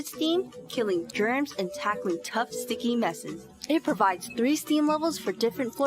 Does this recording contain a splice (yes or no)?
yes